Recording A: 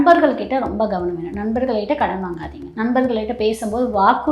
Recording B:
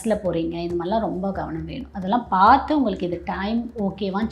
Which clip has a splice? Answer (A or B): A